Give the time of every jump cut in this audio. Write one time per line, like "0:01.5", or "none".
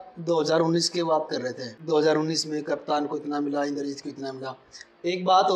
0:01.7

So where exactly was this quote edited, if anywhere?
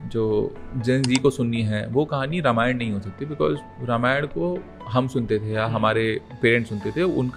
none

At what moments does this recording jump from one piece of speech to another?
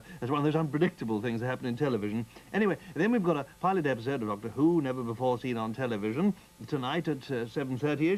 none

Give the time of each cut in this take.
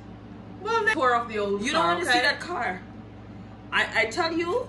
0:00.9

